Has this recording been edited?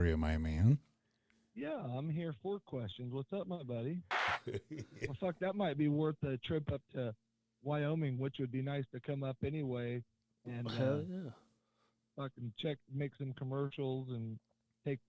yes; 1 cut; at 4.1 s

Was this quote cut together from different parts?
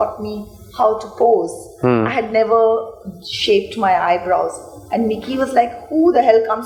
no; 0 cuts

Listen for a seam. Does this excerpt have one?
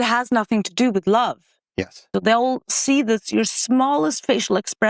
yes; 1 cut; at 2.1 s

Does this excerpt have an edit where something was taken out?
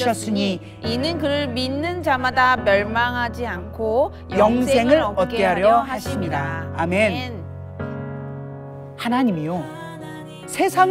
no; 0 cuts

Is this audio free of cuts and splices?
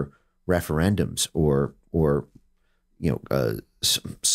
yes; 0 cuts

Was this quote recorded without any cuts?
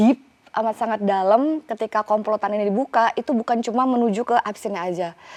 yes; 0 cuts

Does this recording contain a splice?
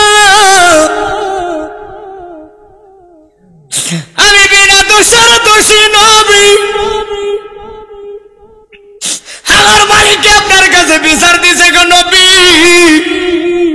no; 0 cuts

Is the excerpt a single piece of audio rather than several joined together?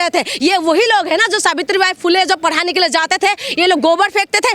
yes; 0 cuts

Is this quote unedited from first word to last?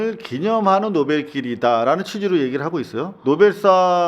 no; 1 cut; at 3.1 s

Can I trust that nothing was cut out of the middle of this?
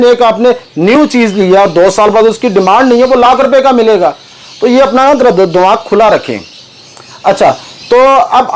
yes; 0 cuts

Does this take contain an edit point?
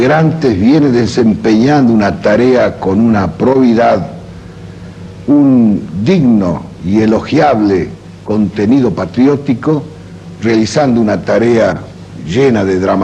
yes; 1 cut; at 4.6 s

